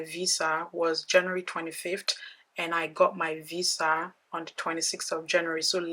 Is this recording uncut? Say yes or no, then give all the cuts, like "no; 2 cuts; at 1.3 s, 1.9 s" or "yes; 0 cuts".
yes; 0 cuts